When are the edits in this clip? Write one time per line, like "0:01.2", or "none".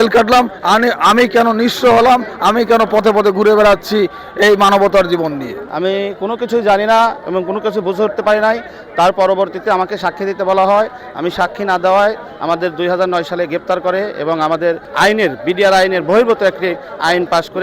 0:05.6